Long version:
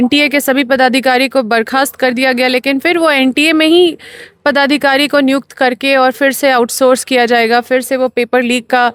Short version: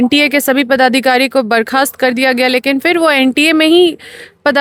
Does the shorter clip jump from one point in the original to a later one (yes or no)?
no